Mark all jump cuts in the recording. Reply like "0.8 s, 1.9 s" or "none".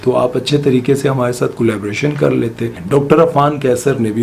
2.8 s